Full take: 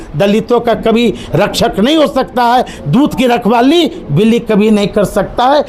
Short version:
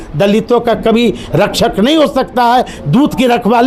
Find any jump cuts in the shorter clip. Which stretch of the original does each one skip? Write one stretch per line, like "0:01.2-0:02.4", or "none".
none

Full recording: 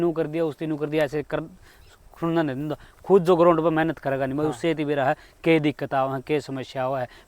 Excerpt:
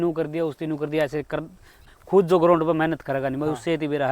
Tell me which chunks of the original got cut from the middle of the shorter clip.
0:01.9-0:02.9

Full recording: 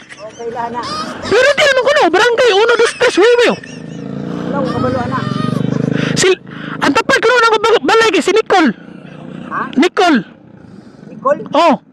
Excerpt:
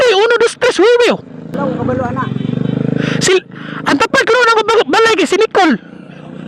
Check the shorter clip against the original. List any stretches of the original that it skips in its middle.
0:03.9-0:04.5

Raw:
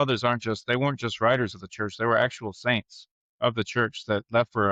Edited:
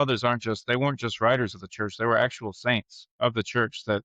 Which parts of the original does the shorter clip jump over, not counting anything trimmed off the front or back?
0:03.0-0:03.2

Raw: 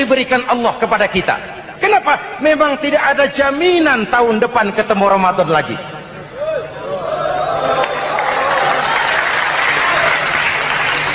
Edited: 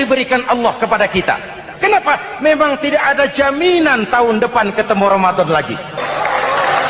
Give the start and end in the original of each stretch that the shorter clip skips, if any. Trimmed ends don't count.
0:06.0-0:07.9

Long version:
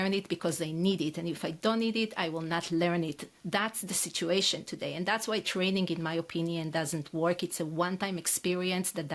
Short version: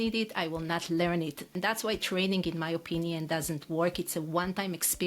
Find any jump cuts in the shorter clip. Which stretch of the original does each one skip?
0:03.3-0:05.0

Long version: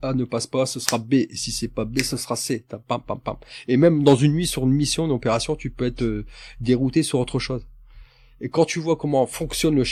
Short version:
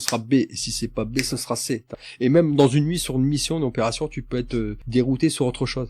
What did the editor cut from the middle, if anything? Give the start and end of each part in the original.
0:02.8-0:03.4
0:06.3-0:06.5

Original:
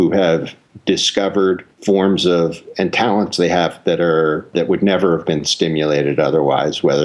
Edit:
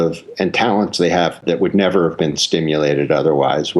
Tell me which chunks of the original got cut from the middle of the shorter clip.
0:03.8-0:04.5

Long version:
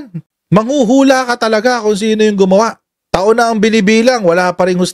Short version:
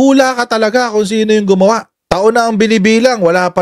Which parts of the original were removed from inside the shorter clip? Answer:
0:02.9-0:03.0

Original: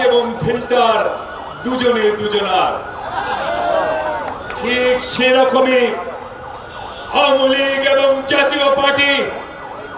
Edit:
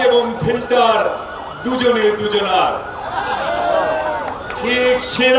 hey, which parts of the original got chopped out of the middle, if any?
none

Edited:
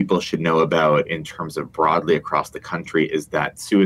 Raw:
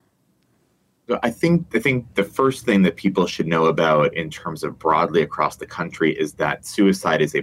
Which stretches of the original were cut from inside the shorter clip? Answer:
none

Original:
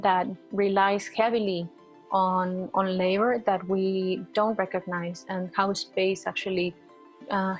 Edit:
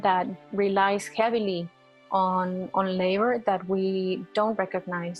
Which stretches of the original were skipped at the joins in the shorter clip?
none

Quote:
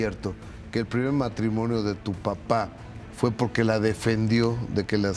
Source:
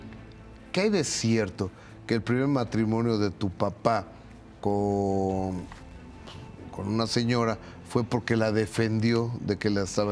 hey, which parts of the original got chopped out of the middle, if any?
0:04.4-0:07.7

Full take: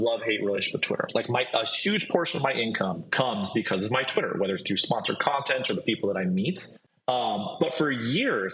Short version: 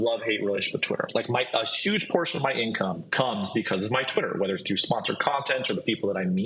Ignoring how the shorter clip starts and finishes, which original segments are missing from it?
none

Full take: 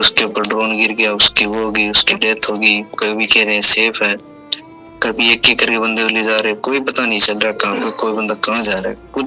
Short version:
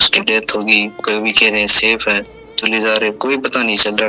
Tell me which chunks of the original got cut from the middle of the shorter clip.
0:04.6-0:06.1

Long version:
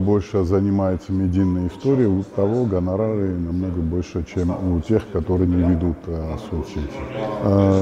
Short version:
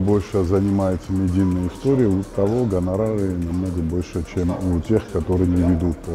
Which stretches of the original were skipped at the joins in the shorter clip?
none

